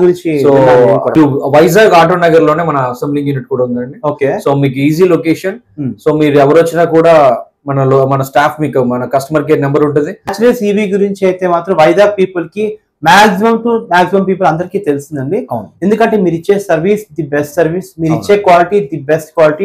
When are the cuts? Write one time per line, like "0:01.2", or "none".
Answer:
0:01.1
0:10.2